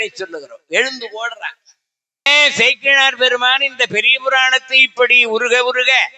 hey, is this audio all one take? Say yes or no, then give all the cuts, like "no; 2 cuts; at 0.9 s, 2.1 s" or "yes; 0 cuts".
no; 1 cut; at 2.3 s